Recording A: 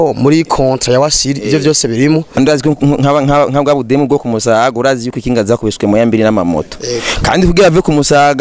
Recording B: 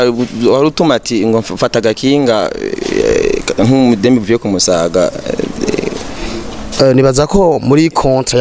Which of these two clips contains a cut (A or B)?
A